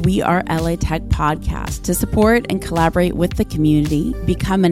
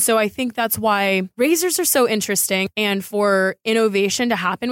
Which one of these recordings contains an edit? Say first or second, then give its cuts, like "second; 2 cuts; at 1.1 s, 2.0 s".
second; 2 cuts; at 1.3 s, 2.6 s